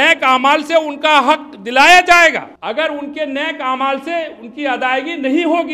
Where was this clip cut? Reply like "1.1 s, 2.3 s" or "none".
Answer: 2.5 s